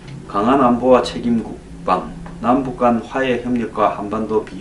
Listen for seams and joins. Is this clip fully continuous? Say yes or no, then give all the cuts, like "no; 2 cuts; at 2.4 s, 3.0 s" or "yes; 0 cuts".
yes; 0 cuts